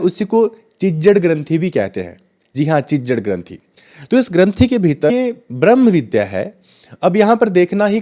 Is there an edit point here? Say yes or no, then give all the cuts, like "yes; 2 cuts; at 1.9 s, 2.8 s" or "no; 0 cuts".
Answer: yes; 1 cut; at 5.1 s